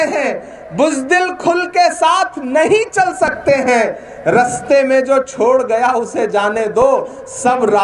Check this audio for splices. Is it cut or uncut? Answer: uncut